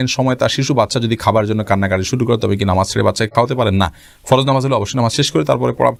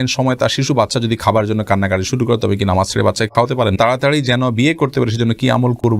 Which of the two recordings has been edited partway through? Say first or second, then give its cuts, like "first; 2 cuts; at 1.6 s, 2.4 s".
second; 1 cut; at 3.7 s